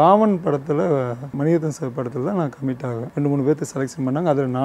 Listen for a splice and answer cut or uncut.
cut